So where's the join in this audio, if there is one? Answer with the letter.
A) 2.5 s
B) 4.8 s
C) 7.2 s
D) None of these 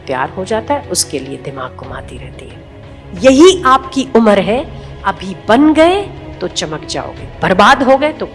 A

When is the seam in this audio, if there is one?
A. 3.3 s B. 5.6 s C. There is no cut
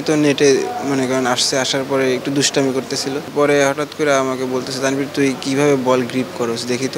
A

